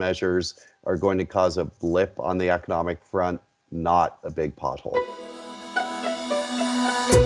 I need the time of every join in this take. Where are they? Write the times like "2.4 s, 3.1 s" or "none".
4.9 s